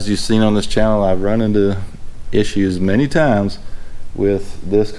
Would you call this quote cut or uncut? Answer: uncut